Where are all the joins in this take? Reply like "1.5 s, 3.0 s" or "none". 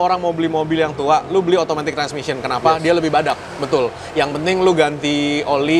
none